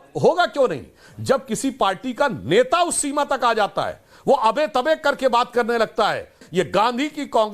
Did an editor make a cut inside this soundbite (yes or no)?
yes